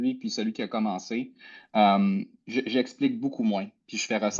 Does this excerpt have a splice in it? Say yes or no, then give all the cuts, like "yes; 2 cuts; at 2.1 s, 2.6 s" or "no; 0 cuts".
no; 0 cuts